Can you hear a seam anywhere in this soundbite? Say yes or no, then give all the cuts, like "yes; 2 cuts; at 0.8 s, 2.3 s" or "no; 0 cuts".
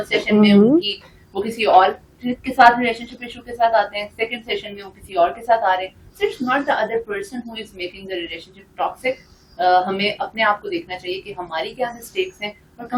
no; 0 cuts